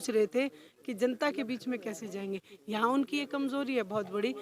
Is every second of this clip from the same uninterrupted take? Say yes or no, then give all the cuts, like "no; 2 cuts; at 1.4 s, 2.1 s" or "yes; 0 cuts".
yes; 0 cuts